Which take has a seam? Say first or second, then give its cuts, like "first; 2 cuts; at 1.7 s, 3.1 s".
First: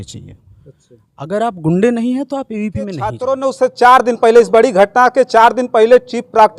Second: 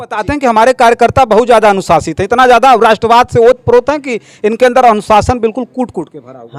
first; 1 cut; at 3.2 s